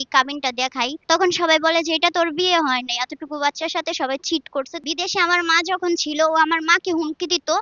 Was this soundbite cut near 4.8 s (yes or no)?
yes